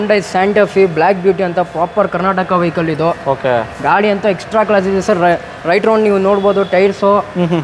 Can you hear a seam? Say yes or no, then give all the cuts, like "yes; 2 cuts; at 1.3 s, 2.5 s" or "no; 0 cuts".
no; 0 cuts